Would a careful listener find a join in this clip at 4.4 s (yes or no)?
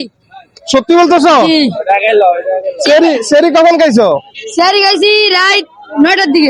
no